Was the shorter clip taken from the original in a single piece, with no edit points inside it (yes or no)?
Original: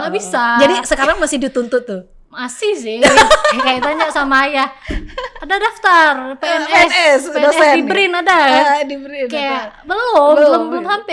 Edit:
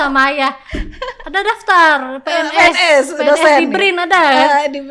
yes